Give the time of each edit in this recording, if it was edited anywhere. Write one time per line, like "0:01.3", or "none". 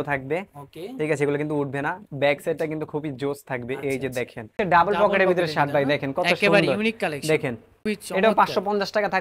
0:04.5
0:07.8